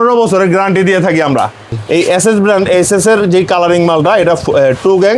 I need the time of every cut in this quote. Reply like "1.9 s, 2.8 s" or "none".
1.7 s